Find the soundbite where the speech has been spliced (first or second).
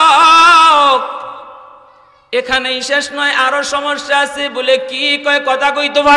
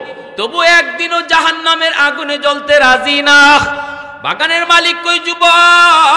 second